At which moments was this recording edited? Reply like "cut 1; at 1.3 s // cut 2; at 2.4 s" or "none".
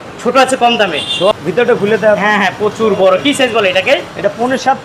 cut 1; at 1.3 s